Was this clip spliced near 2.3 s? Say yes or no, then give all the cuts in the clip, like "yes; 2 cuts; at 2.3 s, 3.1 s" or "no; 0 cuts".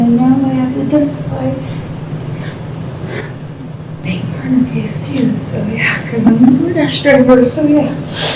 yes; 1 cut; at 2.3 s